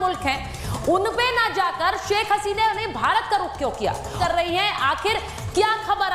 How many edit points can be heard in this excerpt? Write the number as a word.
one